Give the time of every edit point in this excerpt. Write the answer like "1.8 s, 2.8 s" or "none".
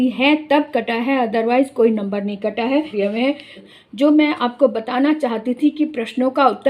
3.3 s

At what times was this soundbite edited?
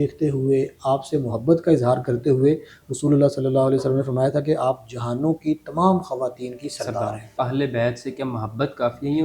7.3 s

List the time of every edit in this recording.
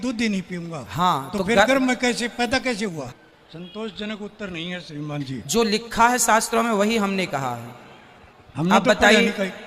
3.0 s

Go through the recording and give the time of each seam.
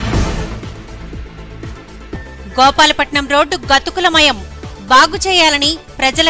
none

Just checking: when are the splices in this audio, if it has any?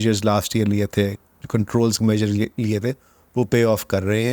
none

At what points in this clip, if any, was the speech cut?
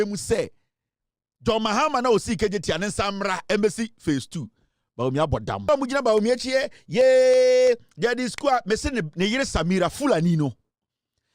5.7 s

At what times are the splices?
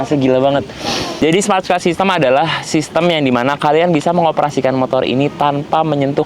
1.1 s

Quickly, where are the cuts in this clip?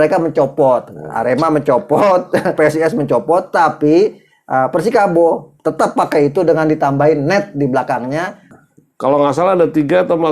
2.6 s, 8.4 s

